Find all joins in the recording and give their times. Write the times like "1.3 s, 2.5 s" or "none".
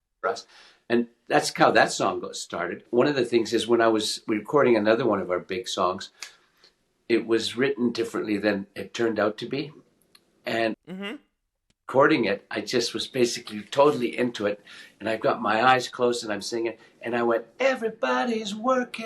2.9 s